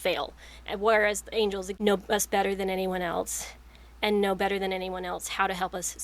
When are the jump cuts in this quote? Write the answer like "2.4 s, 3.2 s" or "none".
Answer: 1.7 s